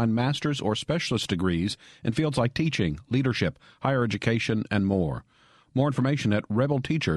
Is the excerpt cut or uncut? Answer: uncut